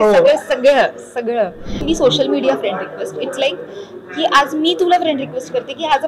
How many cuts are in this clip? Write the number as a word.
one